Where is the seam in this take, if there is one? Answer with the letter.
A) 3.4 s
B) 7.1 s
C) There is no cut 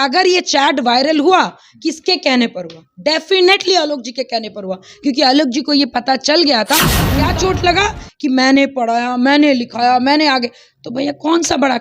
B